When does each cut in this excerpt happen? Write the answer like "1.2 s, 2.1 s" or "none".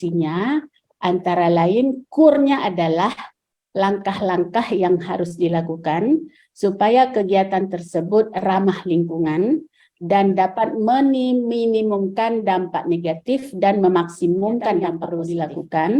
15.0 s